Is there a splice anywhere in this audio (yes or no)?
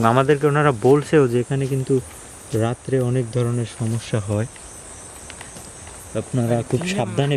no